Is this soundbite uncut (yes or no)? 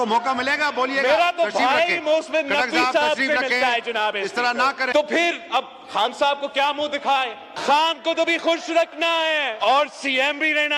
no